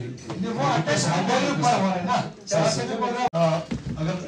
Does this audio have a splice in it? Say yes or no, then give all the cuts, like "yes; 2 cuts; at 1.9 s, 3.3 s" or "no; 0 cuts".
yes; 1 cut; at 3.3 s